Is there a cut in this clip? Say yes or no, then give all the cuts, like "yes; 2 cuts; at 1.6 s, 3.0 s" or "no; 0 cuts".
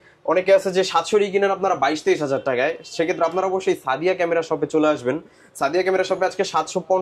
no; 0 cuts